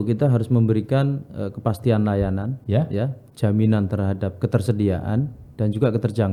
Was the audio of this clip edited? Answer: no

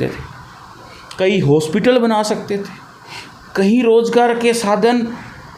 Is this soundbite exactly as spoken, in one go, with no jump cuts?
yes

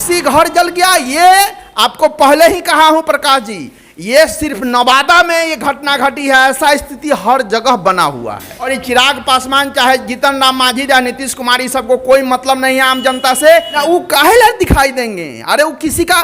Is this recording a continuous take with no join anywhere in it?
no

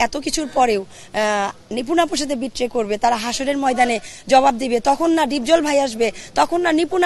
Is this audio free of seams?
yes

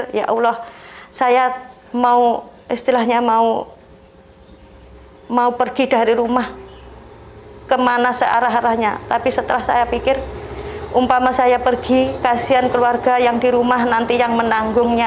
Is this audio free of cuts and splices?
yes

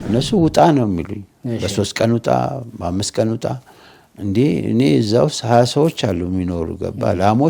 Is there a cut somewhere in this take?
no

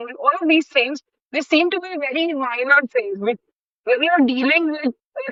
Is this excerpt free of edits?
yes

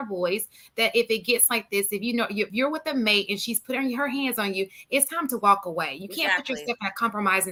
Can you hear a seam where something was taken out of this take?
no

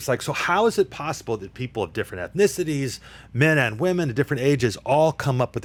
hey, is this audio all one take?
yes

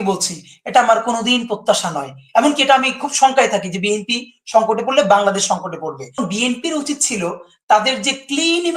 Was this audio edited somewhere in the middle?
yes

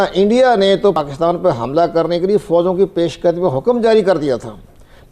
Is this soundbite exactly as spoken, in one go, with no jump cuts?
no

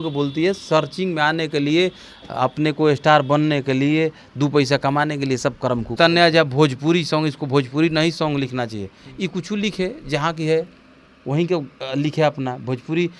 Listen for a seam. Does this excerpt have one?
yes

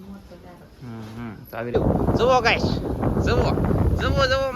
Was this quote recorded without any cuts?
no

